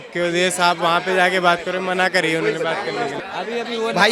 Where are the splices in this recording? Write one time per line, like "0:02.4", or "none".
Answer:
0:03.1